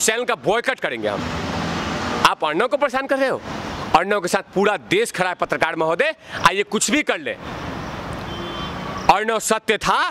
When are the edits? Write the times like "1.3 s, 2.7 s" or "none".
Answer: none